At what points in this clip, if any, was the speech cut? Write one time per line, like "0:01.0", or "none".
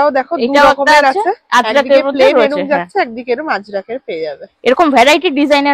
none